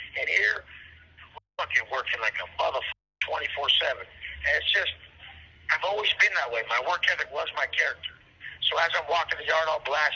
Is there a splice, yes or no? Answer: no